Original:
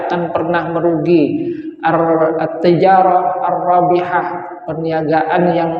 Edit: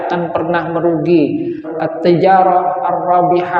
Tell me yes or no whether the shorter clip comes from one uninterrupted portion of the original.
no